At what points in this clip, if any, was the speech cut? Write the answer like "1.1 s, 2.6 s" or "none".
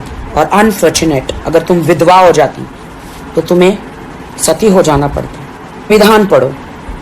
5.9 s